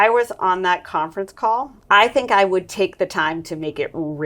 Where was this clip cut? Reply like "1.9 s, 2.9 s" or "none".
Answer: 1.7 s